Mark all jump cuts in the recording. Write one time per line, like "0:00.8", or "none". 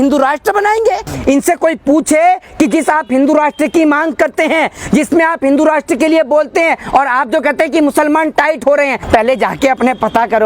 0:01.1
0:09.0